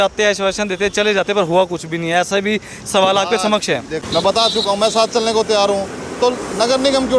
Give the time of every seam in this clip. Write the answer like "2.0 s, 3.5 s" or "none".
4.0 s